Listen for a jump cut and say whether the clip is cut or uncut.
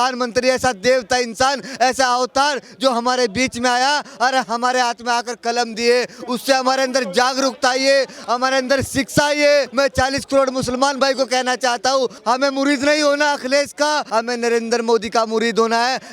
cut